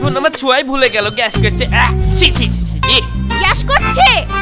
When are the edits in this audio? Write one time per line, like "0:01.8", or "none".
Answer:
none